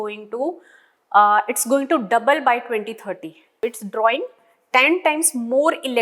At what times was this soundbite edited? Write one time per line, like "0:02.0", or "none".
0:03.6